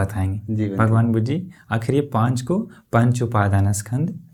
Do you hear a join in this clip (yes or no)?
no